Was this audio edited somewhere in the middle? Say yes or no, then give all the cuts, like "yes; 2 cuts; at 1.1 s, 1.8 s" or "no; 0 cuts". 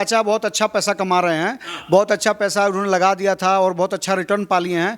no; 0 cuts